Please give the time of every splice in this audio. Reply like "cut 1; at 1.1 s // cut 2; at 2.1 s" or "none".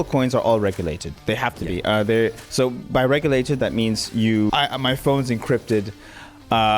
cut 1; at 4.5 s